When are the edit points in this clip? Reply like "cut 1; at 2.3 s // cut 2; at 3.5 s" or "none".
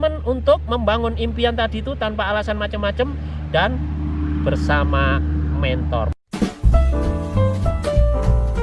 cut 1; at 6.1 s